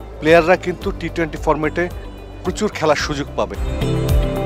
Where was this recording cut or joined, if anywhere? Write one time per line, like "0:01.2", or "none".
0:03.6